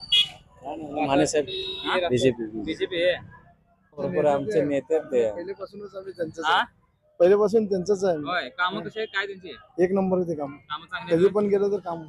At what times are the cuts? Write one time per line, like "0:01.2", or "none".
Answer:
0:01.9
0:04.1